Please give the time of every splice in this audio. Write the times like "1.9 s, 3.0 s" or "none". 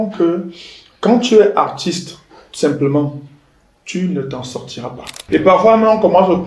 5.2 s